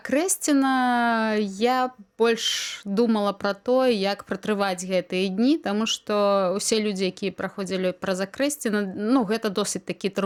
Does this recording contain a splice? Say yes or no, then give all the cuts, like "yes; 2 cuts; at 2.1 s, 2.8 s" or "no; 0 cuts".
no; 0 cuts